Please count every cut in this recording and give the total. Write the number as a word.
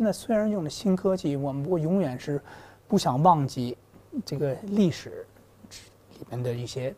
zero